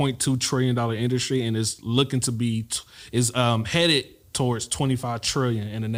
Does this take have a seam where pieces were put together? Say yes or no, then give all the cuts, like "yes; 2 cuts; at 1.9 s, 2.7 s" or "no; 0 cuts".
no; 0 cuts